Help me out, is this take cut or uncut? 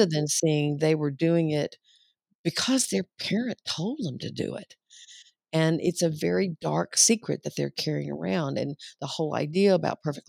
uncut